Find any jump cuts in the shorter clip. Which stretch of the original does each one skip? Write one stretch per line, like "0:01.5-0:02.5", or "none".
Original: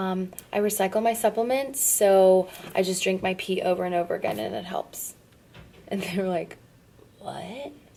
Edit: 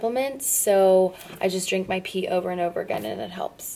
none